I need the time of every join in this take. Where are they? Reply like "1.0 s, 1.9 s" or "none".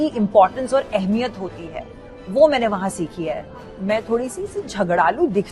3.5 s